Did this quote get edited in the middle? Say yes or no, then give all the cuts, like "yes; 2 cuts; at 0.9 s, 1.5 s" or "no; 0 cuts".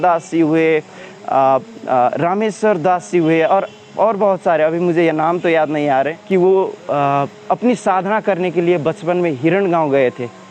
yes; 1 cut; at 6.2 s